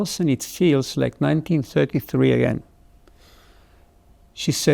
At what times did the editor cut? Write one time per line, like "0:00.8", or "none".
none